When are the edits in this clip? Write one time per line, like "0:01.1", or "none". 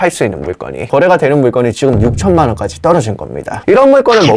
0:00.8
0:03.5